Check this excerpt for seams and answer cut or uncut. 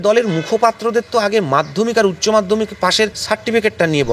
cut